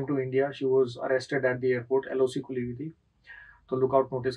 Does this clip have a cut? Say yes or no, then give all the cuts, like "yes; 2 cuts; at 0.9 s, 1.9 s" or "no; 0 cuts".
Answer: no; 0 cuts